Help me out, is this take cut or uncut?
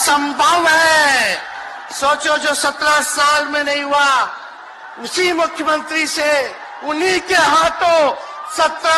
uncut